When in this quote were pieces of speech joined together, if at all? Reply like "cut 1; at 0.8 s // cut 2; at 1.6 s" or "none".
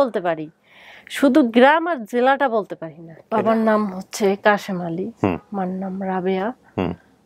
cut 1; at 3.2 s